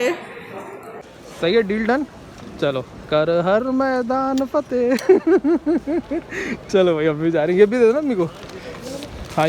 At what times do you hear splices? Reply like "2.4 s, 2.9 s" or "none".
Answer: 1.2 s